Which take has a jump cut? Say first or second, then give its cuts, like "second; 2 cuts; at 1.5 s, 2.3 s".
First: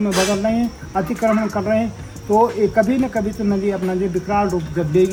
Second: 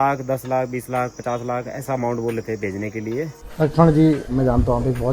second; 2 cuts; at 3.4 s, 4.3 s